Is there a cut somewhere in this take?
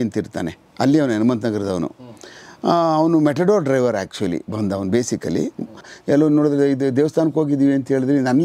yes; 1 cut; at 5.9 s

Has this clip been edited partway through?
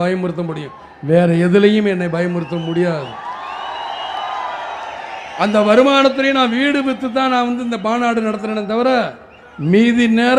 no; 0 cuts

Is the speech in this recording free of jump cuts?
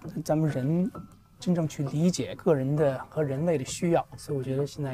no; 1 cut; at 2.3 s

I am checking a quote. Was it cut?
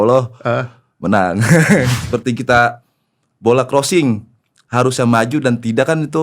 yes; 1 cut; at 2.0 s

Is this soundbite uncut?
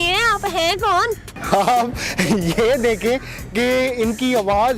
no; 1 cut; at 1.3 s

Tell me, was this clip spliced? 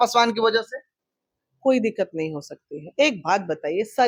no; 0 cuts

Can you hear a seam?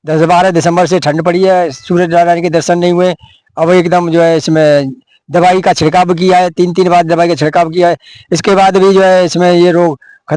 no; 0 cuts

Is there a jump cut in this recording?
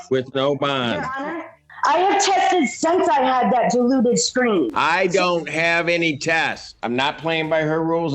yes; 2 cuts; at 1.7 s, 6.7 s

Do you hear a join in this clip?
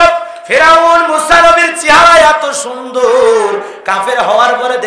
no; 0 cuts

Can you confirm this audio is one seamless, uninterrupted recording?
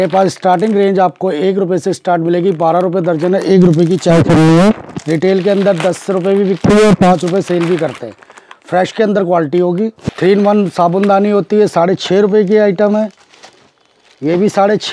no; 1 cut; at 10.0 s

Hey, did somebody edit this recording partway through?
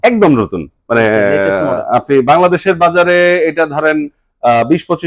no; 0 cuts

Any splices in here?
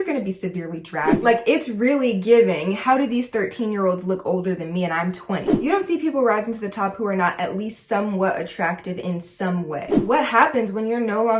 yes; 3 cuts; at 1.2 s, 5.5 s, 10.0 s

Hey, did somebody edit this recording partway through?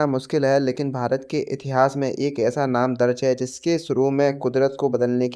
no; 0 cuts

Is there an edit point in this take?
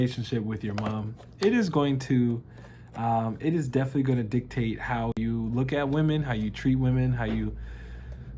no; 0 cuts

